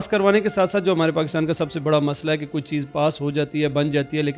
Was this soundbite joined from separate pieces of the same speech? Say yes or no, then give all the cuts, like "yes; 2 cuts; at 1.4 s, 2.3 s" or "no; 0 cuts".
no; 0 cuts